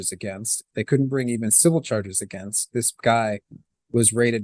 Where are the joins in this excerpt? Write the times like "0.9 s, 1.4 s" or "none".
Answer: none